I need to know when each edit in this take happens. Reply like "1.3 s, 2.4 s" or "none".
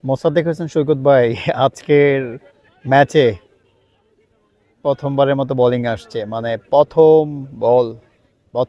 none